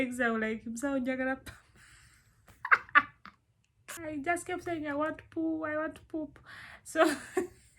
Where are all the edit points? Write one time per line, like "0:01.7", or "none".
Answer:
0:03.9